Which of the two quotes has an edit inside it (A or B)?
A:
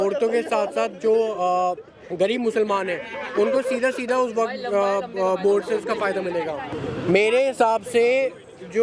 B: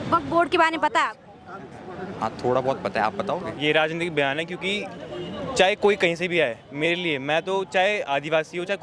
B